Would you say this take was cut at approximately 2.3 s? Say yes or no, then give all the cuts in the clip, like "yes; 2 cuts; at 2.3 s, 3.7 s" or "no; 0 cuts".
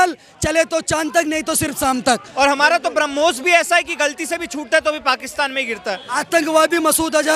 yes; 2 cuts; at 2.3 s, 6.2 s